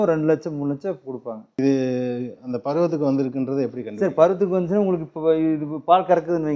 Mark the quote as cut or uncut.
cut